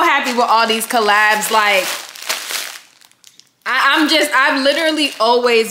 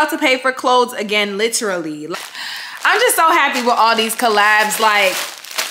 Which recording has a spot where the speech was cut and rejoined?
second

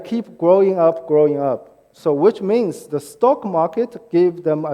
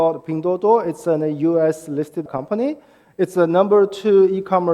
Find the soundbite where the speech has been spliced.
second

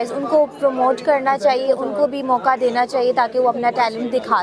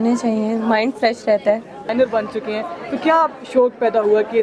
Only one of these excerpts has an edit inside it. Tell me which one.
second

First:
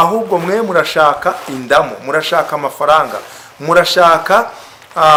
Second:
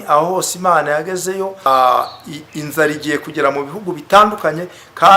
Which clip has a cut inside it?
second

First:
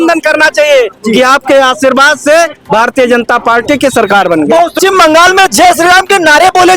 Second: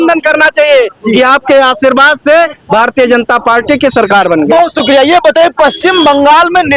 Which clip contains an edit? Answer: first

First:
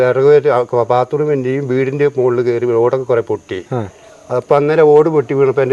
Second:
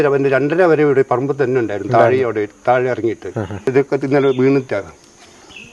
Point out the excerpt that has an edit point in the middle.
second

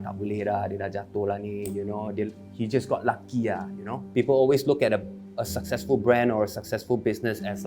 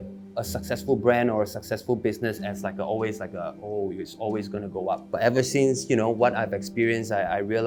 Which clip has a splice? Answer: first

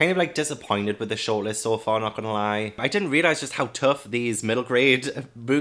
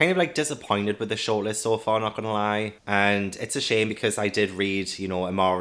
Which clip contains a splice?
first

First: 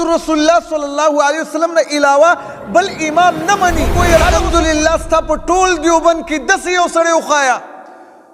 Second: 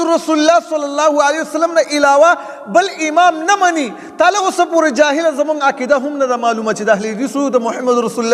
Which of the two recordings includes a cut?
first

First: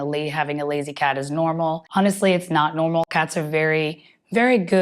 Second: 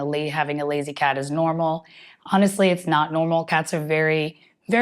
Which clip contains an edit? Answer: first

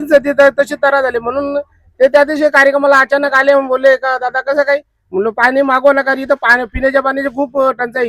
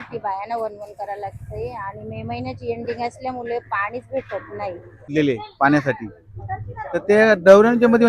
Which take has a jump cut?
second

